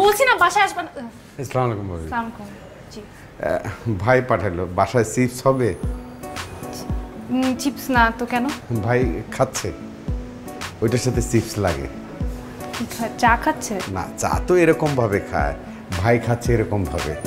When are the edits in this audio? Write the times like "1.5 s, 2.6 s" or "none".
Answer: none

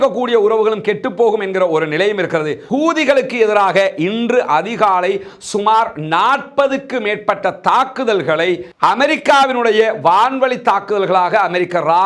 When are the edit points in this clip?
2.6 s

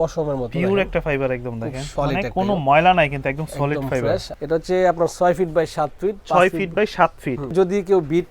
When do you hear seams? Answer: 1.8 s, 4.3 s, 7.5 s

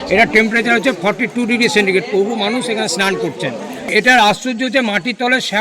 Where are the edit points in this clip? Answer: 3.9 s

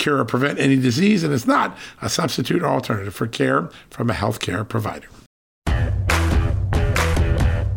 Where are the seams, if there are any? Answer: 5.5 s

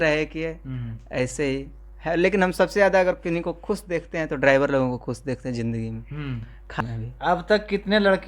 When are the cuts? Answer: 6.8 s

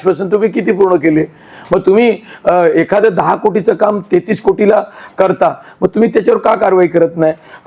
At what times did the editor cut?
none

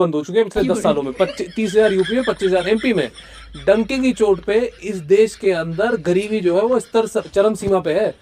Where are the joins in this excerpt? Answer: none

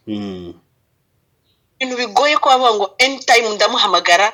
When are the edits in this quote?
none

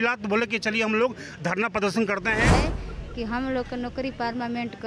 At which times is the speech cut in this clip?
2.5 s

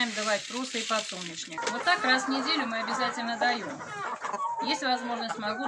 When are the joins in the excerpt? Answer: 1.6 s

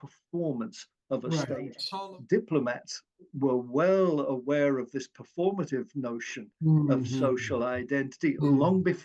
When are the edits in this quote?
1.8 s

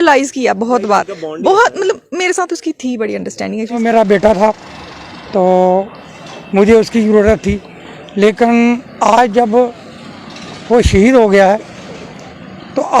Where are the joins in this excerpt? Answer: 3.8 s

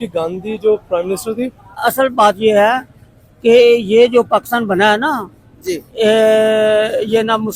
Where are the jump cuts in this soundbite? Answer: 1.7 s

